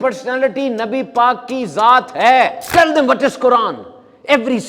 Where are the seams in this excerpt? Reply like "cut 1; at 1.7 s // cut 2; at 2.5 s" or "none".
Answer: cut 1; at 2.6 s

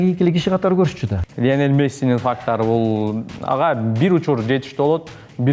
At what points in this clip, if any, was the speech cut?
cut 1; at 1.2 s

